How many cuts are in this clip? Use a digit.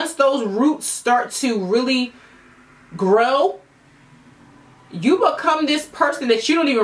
0